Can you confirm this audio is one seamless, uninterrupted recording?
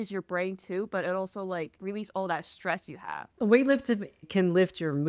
yes; 0 cuts

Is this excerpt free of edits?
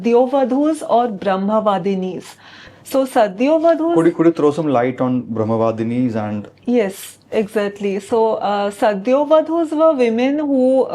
yes; 0 cuts

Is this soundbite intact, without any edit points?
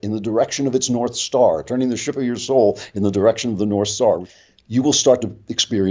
no; 1 cut; at 4.4 s

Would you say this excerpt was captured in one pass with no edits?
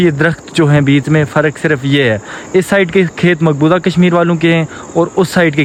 yes; 0 cuts

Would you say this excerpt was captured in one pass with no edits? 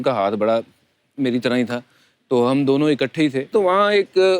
no; 1 cut; at 3.4 s

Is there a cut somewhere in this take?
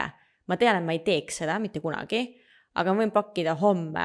no; 0 cuts

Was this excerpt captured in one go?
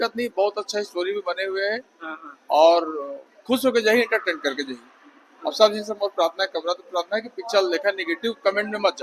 yes; 0 cuts

